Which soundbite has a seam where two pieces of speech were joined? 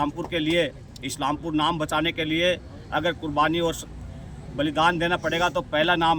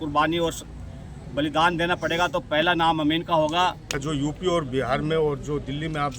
second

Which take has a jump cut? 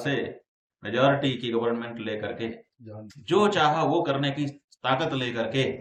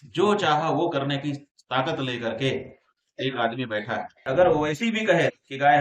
second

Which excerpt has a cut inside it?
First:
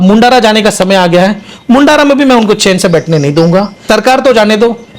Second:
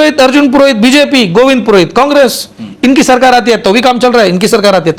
first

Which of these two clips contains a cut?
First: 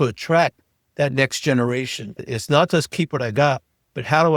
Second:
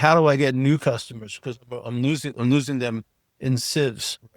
first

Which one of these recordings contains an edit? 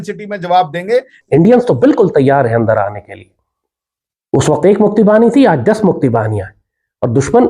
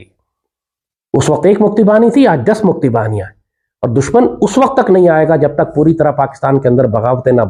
first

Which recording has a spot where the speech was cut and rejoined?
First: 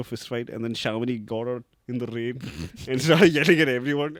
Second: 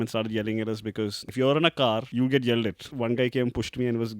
second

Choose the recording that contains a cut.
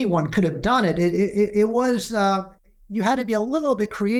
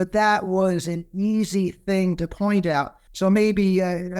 second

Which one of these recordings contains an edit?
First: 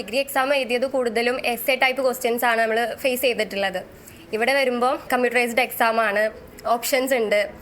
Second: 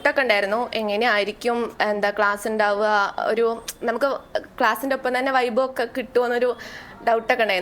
first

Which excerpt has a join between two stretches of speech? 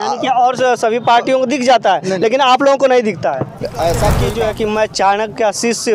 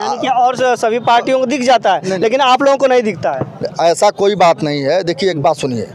first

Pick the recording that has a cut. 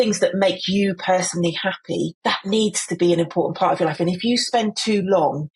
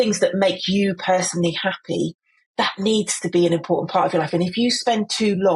first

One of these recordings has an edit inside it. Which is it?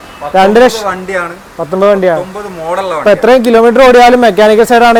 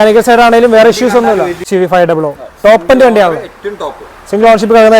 second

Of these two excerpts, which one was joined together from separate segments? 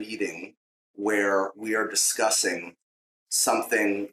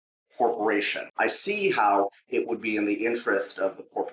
second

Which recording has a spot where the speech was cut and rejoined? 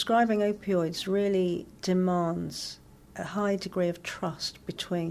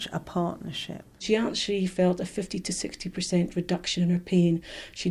second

